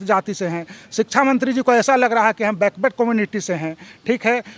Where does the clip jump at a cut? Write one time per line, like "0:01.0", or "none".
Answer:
none